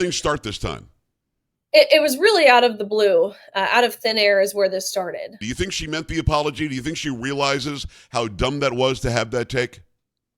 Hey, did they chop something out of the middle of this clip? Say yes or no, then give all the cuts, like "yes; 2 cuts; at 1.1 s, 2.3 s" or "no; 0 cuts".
yes; 1 cut; at 5.4 s